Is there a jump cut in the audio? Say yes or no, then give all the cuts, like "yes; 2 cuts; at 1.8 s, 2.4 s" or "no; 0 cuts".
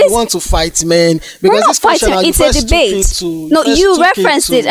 no; 0 cuts